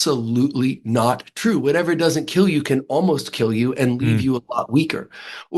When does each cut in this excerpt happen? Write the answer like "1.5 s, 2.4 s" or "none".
none